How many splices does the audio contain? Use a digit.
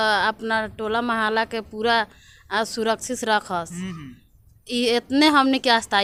0